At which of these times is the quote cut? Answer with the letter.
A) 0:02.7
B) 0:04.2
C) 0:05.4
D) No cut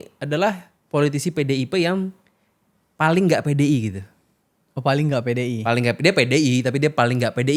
D